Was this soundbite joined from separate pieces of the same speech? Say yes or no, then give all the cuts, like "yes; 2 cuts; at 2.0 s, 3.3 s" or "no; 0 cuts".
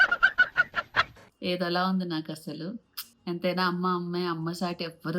yes; 1 cut; at 1.2 s